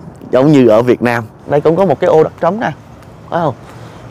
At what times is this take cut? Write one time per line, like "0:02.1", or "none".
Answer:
0:01.3